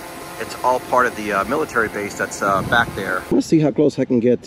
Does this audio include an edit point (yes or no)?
yes